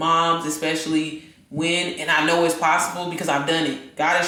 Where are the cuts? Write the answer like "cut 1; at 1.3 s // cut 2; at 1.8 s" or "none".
none